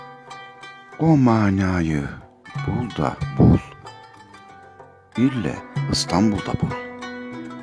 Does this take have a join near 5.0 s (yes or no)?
no